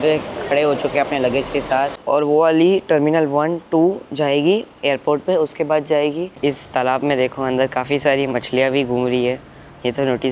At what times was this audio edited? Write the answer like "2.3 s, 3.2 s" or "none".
2.0 s, 6.3 s